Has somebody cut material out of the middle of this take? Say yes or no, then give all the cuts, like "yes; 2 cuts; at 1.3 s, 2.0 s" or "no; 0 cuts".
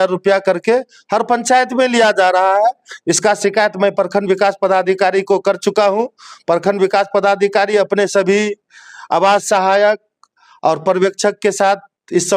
no; 0 cuts